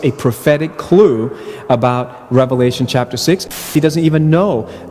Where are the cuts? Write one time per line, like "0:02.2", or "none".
0:03.5